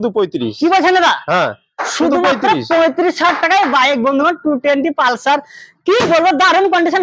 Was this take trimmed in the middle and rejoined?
no; 0 cuts

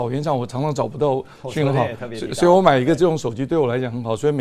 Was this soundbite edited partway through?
no; 0 cuts

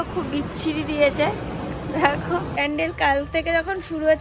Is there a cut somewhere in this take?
yes; 1 cut; at 2.6 s

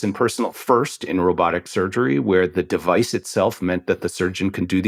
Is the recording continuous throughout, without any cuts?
yes; 0 cuts

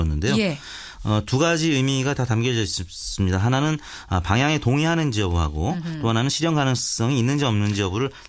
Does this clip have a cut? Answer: yes; 1 cut; at 6.4 s

